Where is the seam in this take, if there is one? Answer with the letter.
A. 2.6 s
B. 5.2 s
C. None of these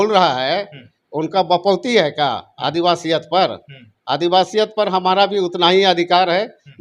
C